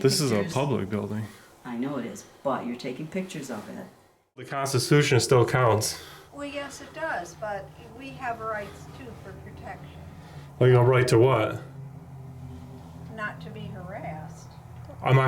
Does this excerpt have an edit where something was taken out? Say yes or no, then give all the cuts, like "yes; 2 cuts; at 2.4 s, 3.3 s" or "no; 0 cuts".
yes; 1 cut; at 4.6 s